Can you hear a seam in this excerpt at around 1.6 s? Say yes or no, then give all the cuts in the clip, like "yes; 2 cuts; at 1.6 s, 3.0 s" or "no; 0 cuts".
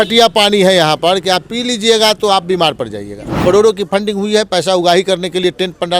no; 1 cut; at 3.3 s